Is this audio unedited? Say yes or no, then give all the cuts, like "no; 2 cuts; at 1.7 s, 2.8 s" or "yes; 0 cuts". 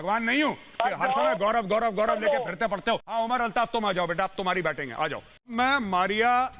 no; 2 cuts; at 3.1 s, 5.7 s